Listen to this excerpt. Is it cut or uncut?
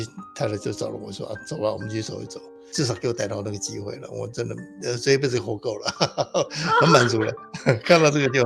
cut